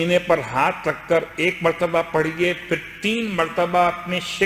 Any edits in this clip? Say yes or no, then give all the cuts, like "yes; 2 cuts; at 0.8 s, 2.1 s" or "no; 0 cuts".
no; 0 cuts